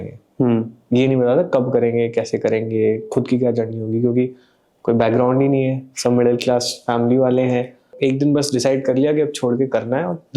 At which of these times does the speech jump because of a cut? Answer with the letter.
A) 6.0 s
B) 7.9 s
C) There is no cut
B